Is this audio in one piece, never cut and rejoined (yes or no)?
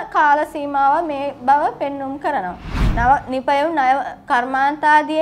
no